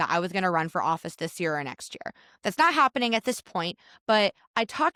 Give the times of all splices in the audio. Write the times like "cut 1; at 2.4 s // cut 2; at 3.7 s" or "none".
none